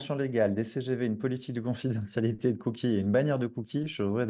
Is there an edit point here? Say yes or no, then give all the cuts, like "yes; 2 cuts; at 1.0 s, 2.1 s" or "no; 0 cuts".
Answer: no; 0 cuts